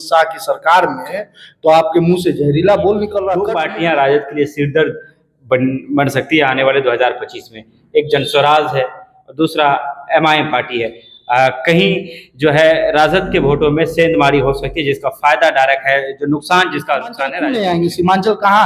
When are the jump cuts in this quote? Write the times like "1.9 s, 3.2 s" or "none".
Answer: 3.4 s, 17.4 s